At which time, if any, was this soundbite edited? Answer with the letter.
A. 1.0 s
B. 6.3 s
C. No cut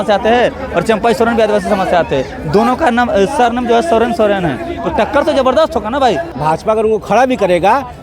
B